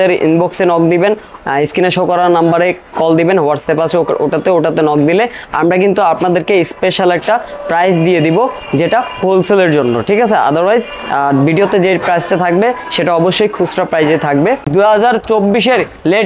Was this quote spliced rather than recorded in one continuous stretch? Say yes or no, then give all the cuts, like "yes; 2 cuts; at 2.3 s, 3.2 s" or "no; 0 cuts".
yes; 1 cut; at 14.7 s